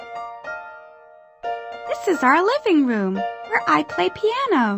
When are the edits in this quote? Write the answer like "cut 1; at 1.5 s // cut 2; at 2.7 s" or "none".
cut 1; at 1.9 s